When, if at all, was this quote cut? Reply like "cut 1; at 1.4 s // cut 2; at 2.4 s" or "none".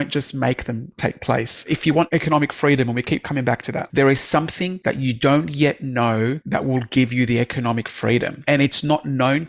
cut 1; at 1.9 s // cut 2; at 3.8 s // cut 3; at 4.7 s // cut 4; at 6.4 s // cut 5; at 8.3 s